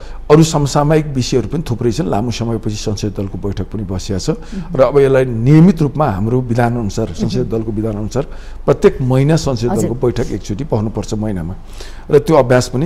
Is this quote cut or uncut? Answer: uncut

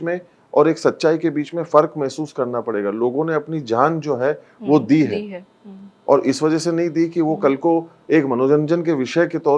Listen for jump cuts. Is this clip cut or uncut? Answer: uncut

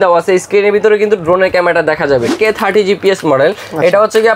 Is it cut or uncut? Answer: cut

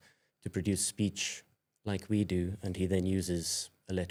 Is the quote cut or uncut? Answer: uncut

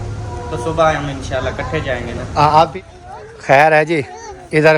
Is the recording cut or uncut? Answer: cut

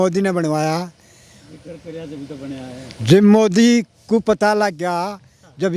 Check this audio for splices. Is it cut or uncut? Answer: uncut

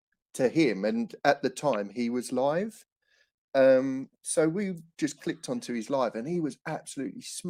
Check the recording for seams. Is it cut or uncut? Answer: uncut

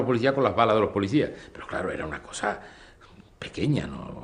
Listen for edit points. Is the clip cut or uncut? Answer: cut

